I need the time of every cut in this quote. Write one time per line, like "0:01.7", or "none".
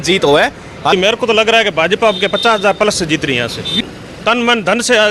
0:00.9
0:03.8

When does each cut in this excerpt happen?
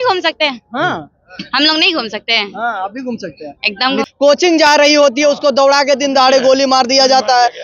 0:04.1

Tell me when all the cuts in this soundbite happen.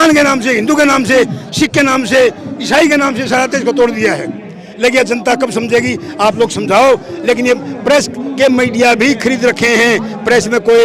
none

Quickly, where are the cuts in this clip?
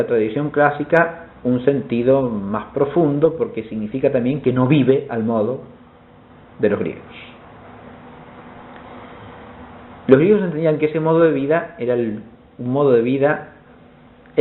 none

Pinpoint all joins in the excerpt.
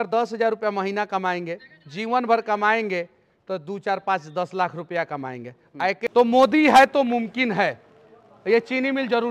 0:06.0

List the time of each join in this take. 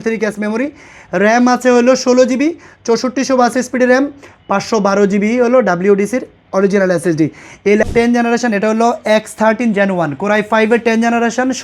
0:07.8

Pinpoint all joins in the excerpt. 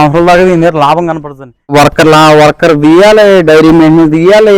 0:01.7

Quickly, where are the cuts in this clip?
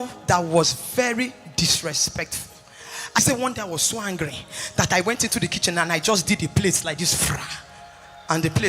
0:03.2

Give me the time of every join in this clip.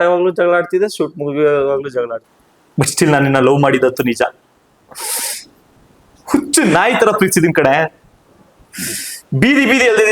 0:02.2

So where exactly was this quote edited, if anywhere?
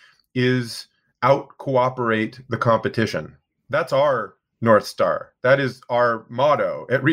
none

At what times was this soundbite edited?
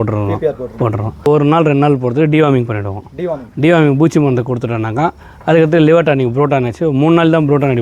0:01.3

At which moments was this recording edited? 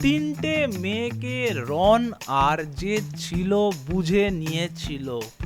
none

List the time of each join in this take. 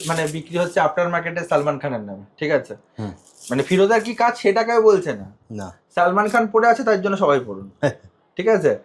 none

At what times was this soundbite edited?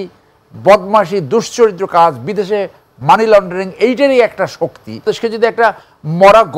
0:05.1

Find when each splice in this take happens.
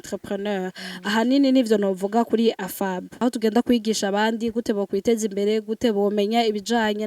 0:03.1

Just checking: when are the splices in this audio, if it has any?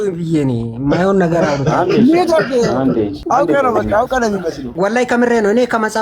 0:03.2
0:04.6

